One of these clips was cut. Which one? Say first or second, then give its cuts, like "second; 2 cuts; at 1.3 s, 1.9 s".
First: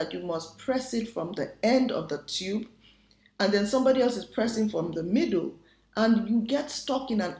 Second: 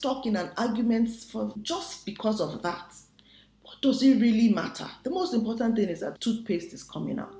second; 2 cuts; at 1.6 s, 6.2 s